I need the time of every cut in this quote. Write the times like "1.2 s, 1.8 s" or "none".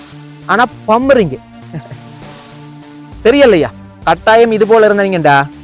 none